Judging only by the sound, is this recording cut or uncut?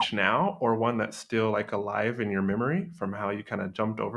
uncut